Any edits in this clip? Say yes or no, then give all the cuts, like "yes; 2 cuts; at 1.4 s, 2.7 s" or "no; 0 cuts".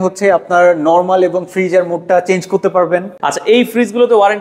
yes; 1 cut; at 3.1 s